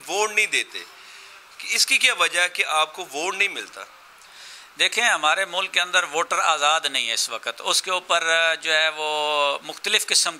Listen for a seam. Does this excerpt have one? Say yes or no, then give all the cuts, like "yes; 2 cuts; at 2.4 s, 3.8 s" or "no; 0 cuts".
no; 0 cuts